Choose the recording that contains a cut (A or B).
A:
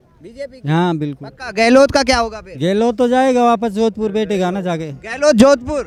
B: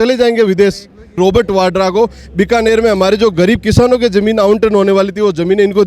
B